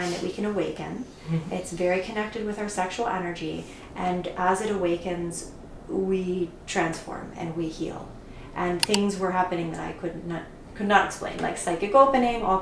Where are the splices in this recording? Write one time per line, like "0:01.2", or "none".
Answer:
none

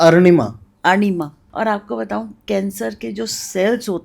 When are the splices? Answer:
0:01.4

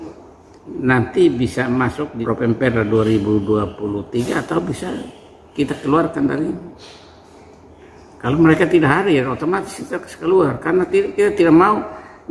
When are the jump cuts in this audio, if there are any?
0:02.1

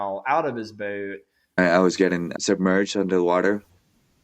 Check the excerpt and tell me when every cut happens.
0:01.5

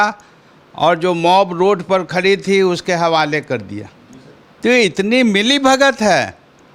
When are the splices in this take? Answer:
none

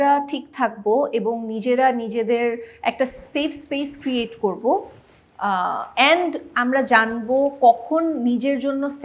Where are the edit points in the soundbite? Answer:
none

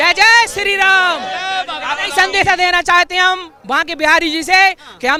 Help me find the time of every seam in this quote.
none

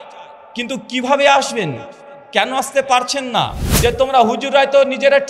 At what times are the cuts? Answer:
0:03.6

